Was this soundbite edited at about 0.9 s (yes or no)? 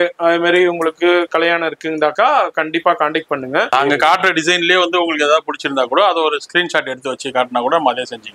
no